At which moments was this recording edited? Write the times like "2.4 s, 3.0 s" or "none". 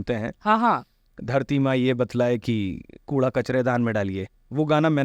none